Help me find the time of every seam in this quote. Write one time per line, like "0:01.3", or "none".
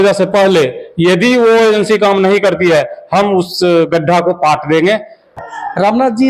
0:05.4